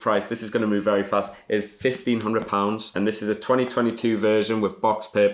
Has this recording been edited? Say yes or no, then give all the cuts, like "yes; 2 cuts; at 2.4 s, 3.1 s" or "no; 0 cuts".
no; 0 cuts